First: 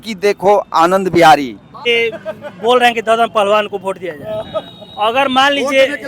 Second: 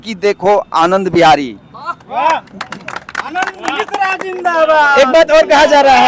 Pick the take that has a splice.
first; 1 cut; at 1.9 s

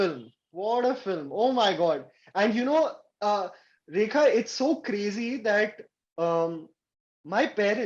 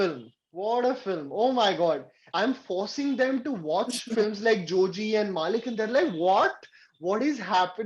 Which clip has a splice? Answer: second; 1 cut; at 2.2 s

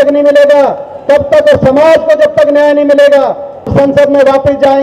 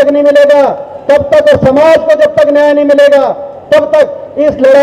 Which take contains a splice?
first; 1 cut; at 3.7 s

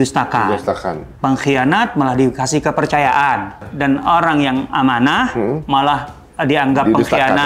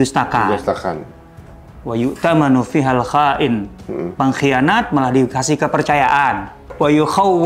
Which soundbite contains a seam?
first; 2 cuts; at 1.1 s, 3.7 s

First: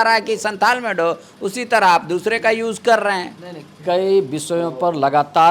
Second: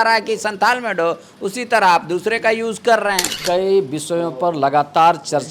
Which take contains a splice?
second; 1 cut; at 3.3 s

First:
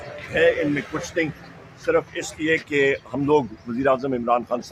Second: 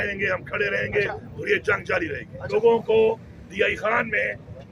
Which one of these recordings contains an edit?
second; 1 cut; at 2.5 s

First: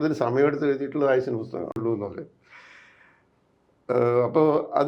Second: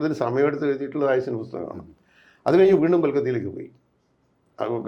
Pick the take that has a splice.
first; 1 cut; at 1.8 s

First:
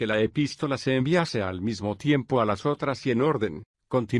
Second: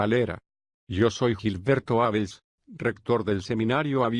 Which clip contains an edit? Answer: first; 1 cut; at 2.2 s

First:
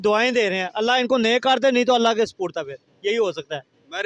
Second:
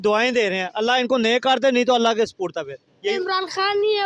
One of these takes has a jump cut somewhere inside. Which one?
second; 1 cut; at 3.1 s

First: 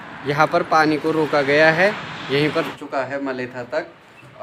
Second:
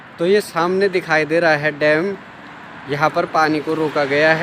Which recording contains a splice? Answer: first; 1 cut; at 2.7 s

